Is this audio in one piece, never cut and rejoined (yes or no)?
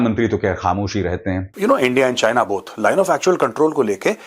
no